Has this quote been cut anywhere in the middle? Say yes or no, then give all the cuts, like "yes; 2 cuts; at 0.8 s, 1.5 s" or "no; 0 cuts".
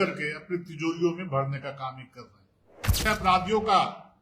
yes; 1 cut; at 3.0 s